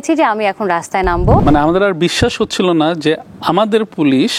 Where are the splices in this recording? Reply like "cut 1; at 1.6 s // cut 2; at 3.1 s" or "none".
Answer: cut 1; at 1.4 s